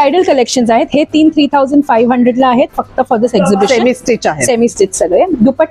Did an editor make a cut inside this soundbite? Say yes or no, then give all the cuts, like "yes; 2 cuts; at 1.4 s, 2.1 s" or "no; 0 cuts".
no; 0 cuts